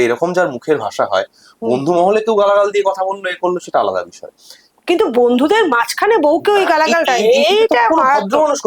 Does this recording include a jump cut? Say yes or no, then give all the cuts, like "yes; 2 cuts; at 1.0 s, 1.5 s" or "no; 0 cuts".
no; 0 cuts